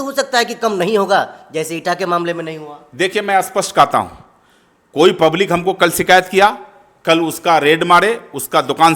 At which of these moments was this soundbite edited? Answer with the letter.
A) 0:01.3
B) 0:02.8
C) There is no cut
C